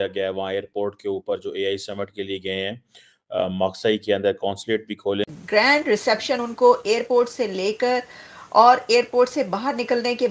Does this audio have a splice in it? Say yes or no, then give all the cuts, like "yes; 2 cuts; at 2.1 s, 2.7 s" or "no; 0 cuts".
yes; 1 cut; at 5.3 s